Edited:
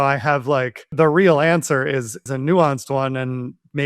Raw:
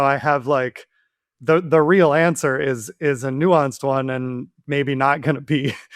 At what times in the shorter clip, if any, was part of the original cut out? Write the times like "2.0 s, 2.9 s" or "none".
0.9 s, 2.2 s